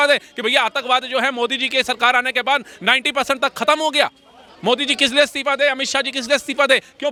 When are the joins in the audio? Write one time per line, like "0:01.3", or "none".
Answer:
none

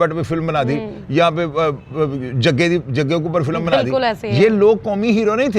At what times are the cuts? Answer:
none

